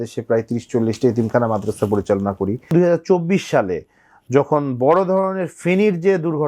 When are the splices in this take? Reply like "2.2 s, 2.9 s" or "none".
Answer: 2.7 s